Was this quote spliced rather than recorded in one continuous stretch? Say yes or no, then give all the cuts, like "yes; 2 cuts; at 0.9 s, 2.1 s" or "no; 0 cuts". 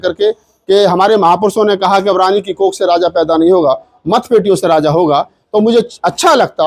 no; 0 cuts